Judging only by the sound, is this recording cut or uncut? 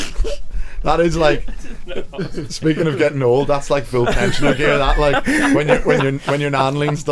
uncut